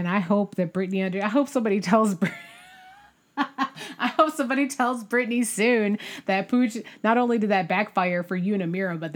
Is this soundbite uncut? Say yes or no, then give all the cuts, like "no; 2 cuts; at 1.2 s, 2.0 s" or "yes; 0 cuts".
yes; 0 cuts